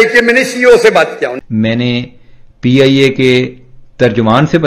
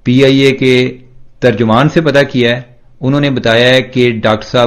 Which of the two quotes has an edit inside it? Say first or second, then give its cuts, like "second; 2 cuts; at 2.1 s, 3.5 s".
first; 1 cut; at 1.3 s